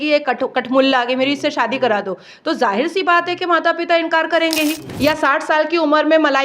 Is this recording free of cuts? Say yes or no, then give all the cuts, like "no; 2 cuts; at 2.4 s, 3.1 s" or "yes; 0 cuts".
no; 1 cut; at 4.9 s